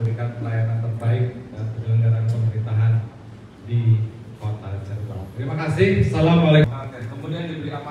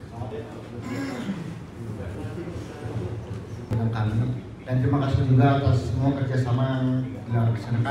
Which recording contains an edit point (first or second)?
first